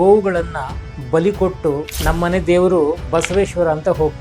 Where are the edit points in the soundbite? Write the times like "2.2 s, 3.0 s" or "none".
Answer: 1.9 s, 3.0 s